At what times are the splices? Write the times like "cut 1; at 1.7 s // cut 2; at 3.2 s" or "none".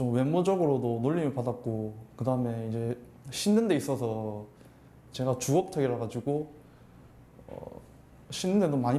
none